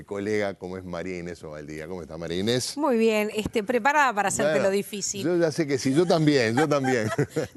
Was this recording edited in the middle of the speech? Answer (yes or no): no